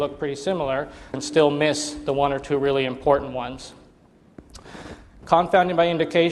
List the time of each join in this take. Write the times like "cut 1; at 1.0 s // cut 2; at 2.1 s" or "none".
none

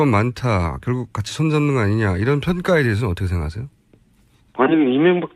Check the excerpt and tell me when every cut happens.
none

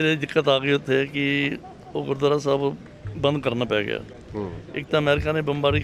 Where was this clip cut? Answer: none

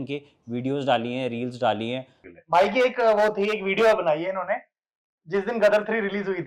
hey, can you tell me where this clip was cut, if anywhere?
cut 1; at 2.2 s

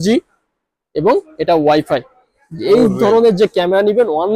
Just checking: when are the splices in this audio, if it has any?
none

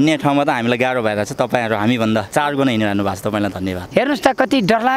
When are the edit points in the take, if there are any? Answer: cut 1; at 3.8 s

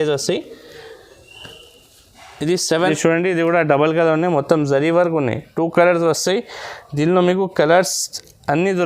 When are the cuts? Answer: cut 1; at 2.8 s

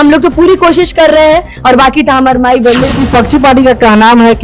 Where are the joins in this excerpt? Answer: cut 1; at 2.9 s

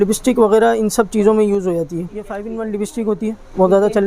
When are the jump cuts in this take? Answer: cut 1; at 2.3 s

